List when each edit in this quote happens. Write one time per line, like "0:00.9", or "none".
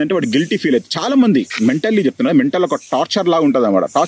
none

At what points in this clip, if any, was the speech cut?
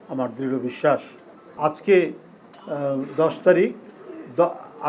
0:01.5

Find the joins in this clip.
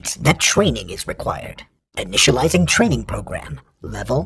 none

